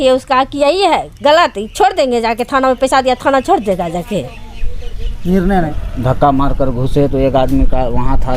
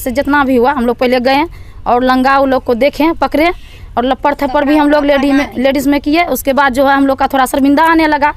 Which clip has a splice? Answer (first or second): first